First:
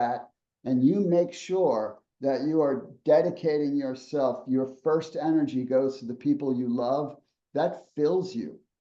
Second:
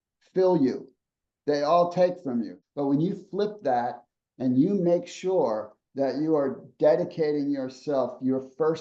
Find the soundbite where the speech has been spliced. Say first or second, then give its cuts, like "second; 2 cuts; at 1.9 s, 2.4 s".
second; 1 cut; at 2.6 s